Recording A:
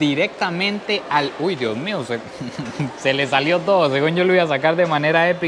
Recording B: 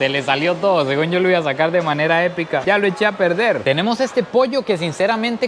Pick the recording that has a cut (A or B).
B